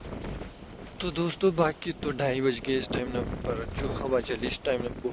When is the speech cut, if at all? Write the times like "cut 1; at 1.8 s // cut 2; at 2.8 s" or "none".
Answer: none